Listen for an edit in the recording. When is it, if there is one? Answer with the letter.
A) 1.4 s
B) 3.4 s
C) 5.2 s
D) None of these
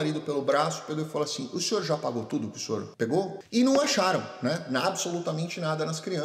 B